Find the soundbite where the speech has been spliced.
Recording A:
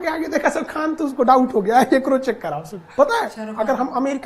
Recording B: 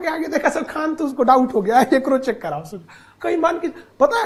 A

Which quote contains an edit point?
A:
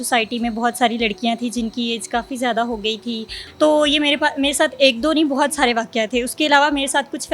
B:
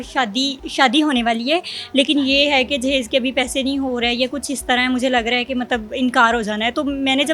A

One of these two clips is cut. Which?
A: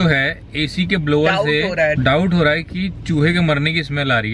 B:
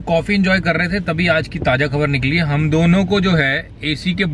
A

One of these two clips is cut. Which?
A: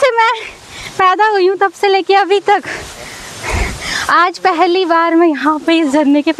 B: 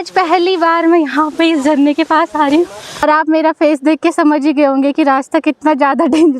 B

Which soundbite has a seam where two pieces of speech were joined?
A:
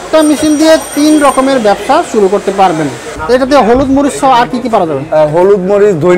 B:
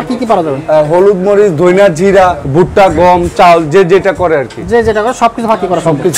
A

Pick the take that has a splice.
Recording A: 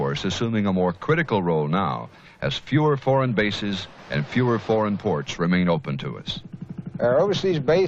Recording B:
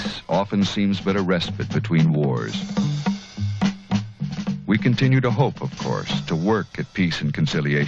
B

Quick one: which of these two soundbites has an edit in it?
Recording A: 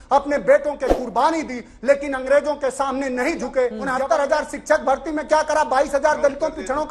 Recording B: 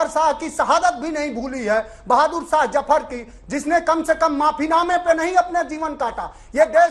A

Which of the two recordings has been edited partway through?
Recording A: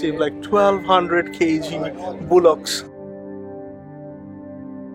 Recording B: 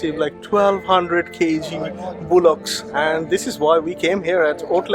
B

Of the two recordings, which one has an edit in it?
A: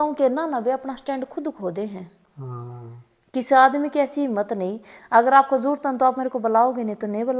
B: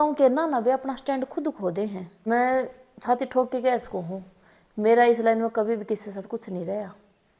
B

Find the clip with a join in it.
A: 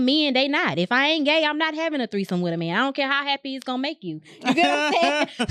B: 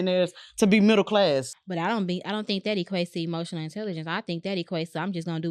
B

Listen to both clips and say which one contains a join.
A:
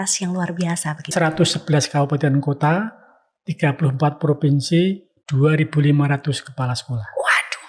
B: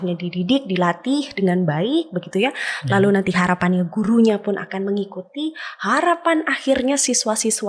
A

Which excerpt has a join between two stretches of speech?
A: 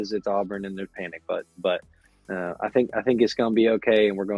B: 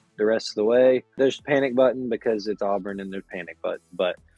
B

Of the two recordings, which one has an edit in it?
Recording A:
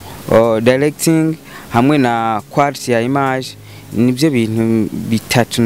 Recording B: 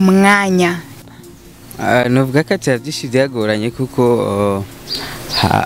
B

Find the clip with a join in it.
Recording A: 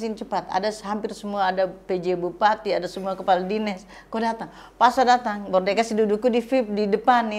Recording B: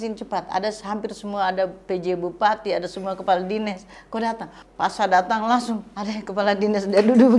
B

